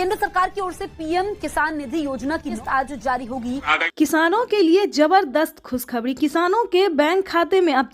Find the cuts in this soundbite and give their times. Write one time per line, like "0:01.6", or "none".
0:03.7